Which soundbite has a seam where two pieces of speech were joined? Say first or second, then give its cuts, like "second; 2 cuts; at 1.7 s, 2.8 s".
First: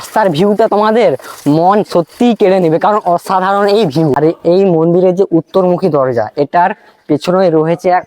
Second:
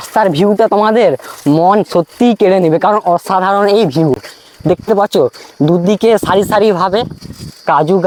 first; 1 cut; at 4.2 s